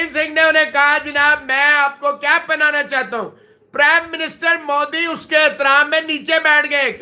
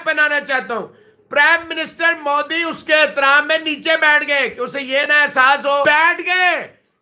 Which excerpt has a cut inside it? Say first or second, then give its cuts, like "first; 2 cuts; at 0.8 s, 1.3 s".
second; 1 cut; at 5.8 s